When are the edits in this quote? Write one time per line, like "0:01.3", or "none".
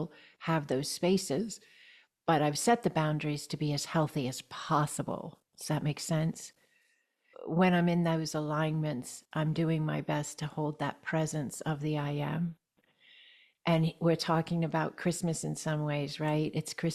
0:07.3